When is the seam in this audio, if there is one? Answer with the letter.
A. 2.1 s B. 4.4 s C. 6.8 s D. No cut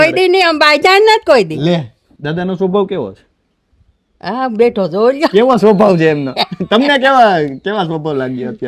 A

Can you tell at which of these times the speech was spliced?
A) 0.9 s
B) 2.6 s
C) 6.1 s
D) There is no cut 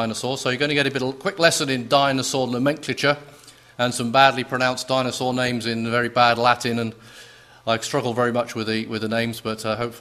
B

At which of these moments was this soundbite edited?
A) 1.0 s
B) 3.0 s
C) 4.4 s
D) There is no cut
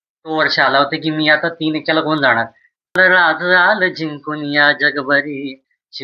B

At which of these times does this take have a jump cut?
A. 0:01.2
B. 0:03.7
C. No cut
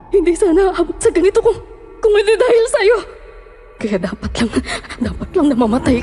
B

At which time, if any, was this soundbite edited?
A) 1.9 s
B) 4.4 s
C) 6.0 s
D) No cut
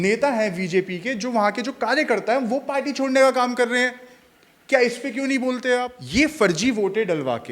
C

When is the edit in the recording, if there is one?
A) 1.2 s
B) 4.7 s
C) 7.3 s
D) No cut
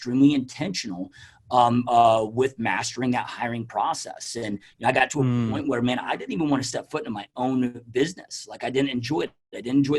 D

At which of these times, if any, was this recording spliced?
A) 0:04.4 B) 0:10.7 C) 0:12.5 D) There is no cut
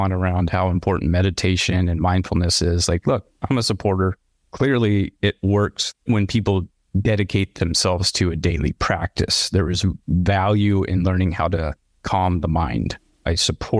D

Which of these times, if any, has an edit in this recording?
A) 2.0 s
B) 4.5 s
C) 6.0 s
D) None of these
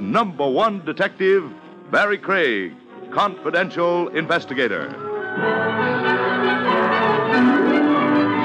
C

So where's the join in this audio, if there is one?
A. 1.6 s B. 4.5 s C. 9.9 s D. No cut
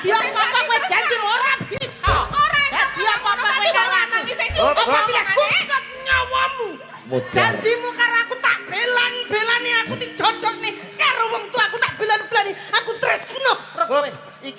D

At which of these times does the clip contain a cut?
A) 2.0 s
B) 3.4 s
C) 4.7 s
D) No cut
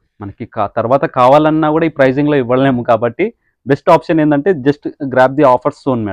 D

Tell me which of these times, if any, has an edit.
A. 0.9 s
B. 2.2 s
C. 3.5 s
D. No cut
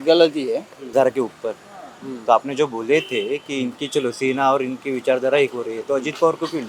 A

